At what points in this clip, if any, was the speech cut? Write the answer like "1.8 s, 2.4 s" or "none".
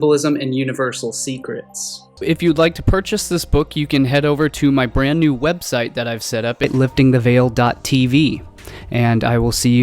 6.6 s